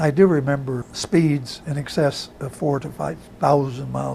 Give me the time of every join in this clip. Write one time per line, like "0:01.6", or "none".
0:00.9